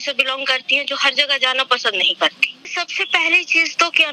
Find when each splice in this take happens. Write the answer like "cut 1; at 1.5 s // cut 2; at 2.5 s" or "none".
cut 1; at 2.5 s